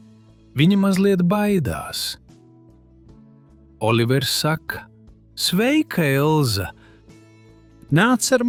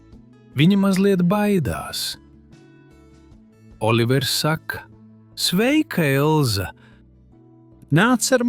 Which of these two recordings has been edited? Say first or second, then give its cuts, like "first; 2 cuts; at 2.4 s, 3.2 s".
second; 2 cuts; at 2.2 s, 3.8 s